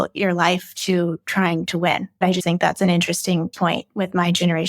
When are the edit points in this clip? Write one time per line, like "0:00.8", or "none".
0:02.3
0:03.5